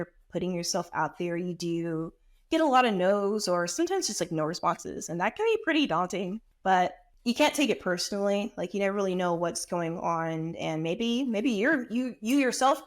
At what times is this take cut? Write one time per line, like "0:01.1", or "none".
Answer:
0:06.4
0:07.1